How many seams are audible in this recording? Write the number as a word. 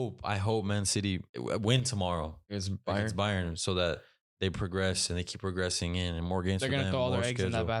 two